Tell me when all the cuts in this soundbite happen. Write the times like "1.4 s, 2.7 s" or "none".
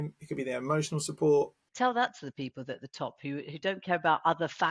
1.6 s